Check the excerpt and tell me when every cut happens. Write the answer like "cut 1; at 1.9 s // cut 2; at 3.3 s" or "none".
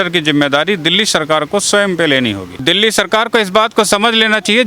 cut 1; at 2.6 s

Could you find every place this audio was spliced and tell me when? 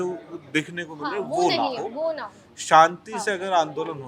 none

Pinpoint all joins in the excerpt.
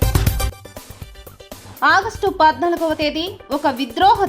cut 1; at 1.6 s

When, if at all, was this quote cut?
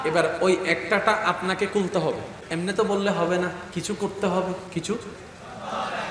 cut 1; at 2.4 s // cut 2; at 3.7 s // cut 3; at 4.7 s

